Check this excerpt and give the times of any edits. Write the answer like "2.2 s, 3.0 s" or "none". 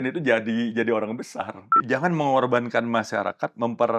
1.8 s